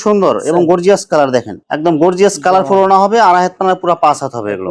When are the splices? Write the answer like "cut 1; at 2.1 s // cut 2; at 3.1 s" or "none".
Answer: cut 1; at 1.6 s